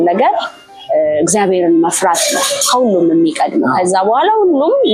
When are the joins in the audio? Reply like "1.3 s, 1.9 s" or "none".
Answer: none